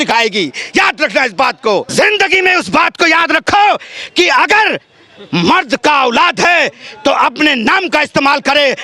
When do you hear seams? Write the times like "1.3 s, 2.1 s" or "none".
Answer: 1.9 s

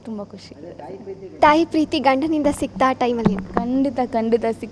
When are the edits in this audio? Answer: 1.4 s

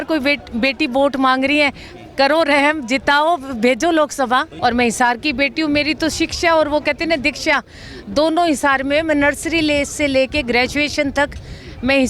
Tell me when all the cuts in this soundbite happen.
4.5 s

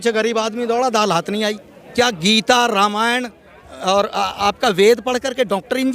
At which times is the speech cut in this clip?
1.9 s

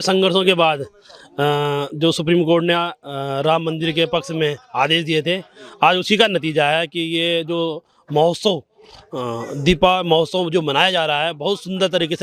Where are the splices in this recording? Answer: none

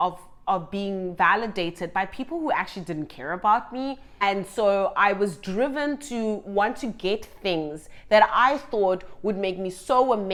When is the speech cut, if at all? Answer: none

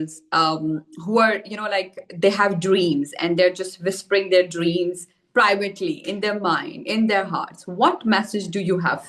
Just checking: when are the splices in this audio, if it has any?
none

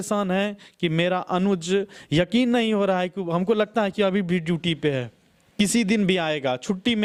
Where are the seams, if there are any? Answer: none

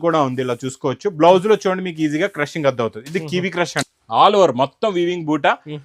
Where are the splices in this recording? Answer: 3.8 s

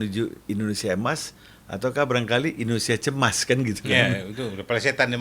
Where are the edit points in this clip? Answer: none

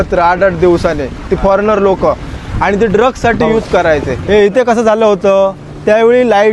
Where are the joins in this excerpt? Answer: 4.1 s

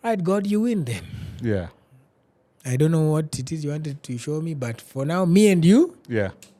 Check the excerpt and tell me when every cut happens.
none

